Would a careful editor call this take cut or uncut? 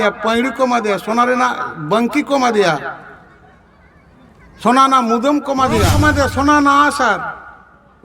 cut